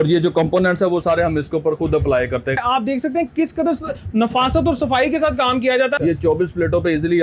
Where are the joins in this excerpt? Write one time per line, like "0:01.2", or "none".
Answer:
0:02.6
0:06.0